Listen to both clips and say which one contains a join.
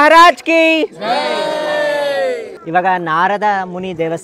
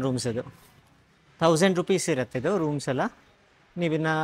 first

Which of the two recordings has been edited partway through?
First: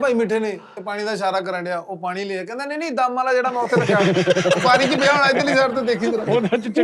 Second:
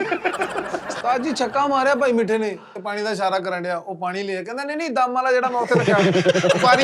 second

